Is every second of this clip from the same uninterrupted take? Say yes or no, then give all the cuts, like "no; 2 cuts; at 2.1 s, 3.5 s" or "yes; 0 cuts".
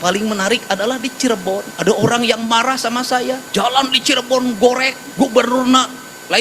no; 3 cuts; at 1.7 s, 3.4 s, 5.0 s